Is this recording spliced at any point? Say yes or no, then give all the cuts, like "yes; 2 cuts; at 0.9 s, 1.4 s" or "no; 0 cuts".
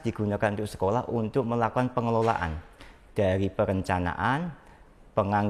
no; 0 cuts